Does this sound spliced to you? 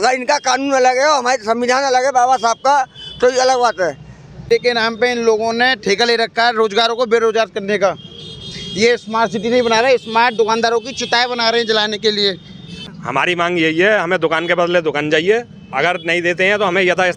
yes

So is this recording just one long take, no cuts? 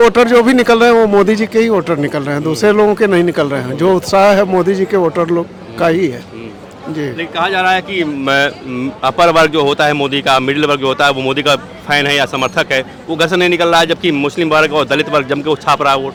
yes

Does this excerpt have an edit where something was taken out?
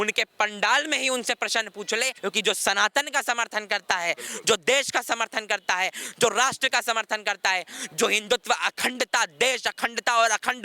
yes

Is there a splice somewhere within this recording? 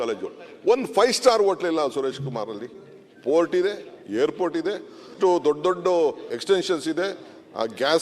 yes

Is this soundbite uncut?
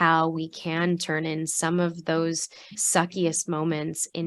no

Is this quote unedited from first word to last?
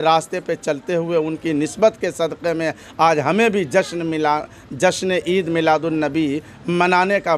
yes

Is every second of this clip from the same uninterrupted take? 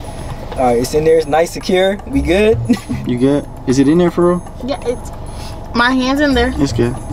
yes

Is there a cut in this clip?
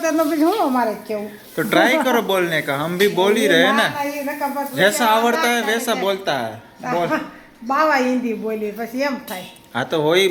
no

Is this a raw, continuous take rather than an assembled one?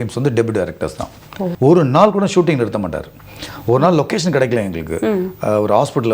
no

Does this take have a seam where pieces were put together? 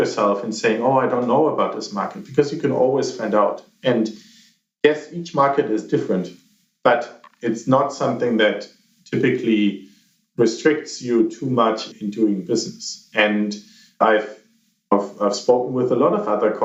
no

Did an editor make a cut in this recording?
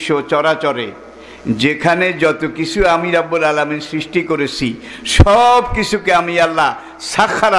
no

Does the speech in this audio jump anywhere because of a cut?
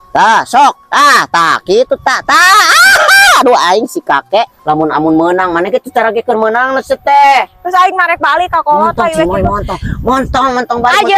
yes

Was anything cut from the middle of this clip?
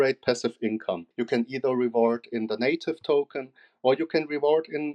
yes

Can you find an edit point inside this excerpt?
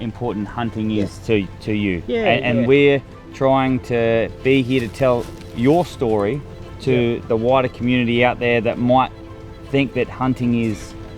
no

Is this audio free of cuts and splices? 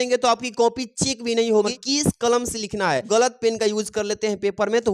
no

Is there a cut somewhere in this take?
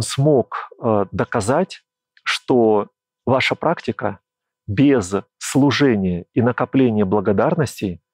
yes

